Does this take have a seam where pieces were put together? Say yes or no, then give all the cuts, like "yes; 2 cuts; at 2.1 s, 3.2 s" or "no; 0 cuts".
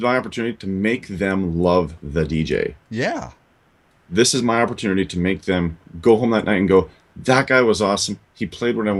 no; 0 cuts